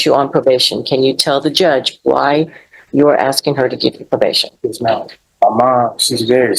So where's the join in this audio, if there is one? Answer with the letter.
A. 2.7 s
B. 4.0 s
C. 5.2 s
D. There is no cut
C